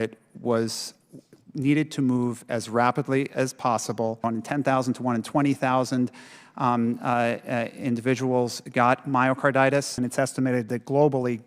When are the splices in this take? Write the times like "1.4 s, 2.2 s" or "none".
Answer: 4.2 s, 10.0 s